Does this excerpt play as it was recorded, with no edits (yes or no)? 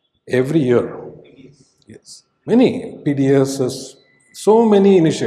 yes